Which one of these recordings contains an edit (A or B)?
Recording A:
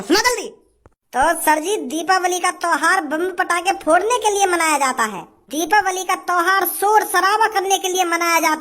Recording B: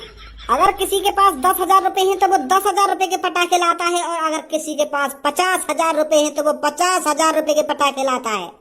A